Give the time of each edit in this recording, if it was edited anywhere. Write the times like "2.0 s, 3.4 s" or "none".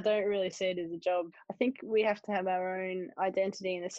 1.4 s